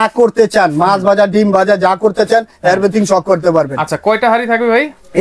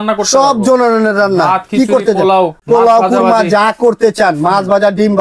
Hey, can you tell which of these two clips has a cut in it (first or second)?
second